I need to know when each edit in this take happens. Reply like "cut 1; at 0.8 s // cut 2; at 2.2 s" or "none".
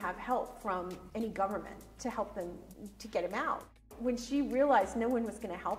cut 1; at 1.0 s // cut 2; at 2.7 s // cut 3; at 3.8 s